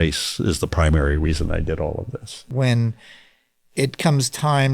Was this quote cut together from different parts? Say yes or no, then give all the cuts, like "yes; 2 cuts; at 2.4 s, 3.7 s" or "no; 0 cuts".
yes; 1 cut; at 2.4 s